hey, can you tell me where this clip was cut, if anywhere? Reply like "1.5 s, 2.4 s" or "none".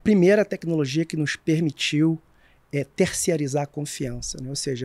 none